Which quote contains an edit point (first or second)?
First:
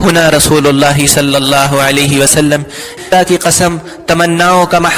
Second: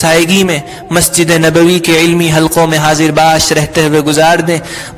first